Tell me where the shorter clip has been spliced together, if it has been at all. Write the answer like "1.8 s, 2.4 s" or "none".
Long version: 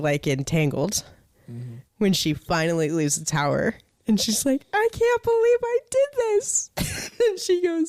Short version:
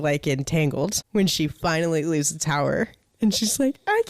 1.0 s